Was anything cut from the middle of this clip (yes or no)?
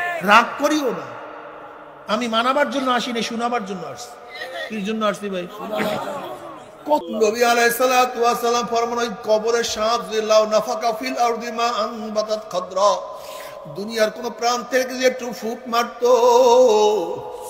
yes